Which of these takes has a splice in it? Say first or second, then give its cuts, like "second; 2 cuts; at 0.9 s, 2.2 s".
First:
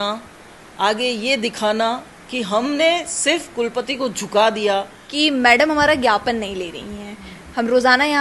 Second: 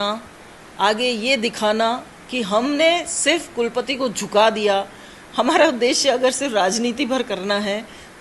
first; 1 cut; at 5.0 s